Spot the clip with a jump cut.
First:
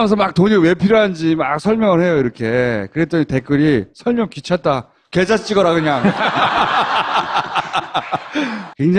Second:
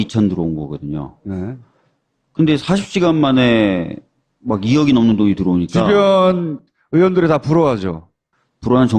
second; 1 cut; at 3.3 s

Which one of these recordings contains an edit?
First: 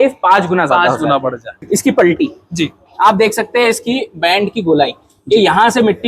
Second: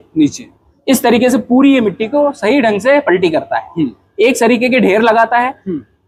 first; 1 cut; at 1.5 s

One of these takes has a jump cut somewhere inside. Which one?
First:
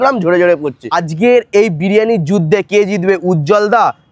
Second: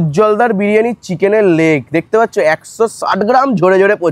first; 1 cut; at 1.0 s

